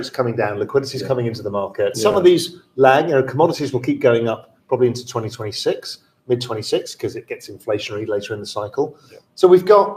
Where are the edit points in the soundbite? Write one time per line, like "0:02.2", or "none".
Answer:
0:02.0

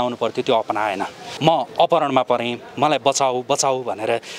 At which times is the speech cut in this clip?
0:01.2

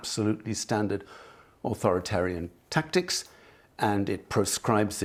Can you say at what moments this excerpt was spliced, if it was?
none

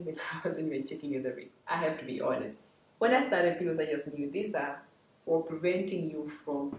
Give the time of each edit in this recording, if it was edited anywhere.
0:01.5

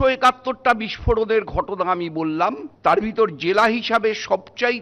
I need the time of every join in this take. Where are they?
0:02.7

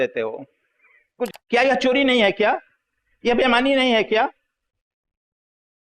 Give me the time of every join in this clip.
0:01.3

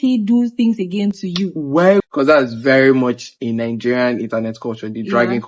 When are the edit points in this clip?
0:02.0

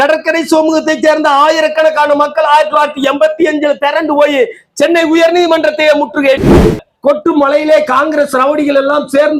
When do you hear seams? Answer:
0:06.4

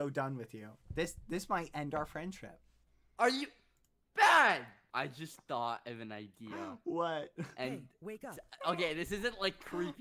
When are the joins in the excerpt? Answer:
0:04.8

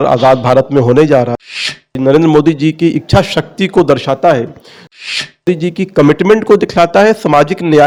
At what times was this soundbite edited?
none

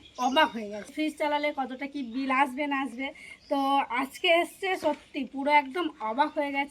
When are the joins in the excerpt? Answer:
0:00.9

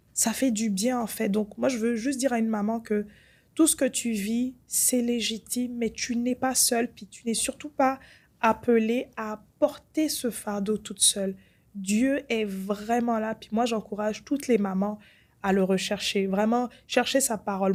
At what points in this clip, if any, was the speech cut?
none

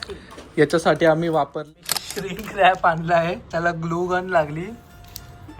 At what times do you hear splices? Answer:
0:01.6

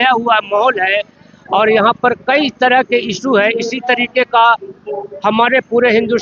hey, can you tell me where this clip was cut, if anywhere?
none

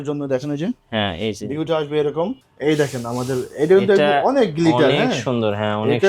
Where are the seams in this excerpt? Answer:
0:02.4

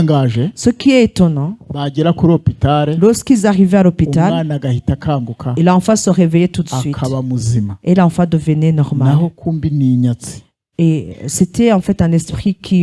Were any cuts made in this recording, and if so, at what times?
none

